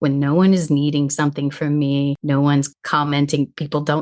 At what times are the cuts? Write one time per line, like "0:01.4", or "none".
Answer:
0:02.4